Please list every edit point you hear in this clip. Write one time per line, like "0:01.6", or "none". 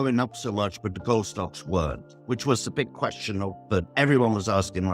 0:03.9

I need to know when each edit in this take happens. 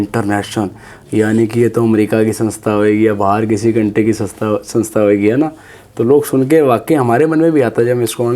none

